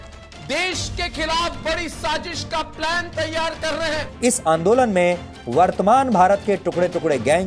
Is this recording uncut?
no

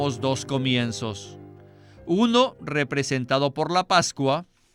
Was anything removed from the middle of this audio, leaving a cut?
no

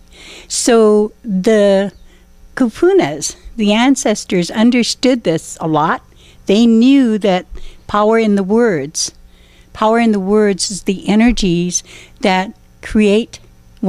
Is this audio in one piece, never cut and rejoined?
yes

